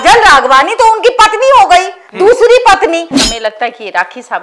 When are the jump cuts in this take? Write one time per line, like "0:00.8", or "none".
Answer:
0:03.1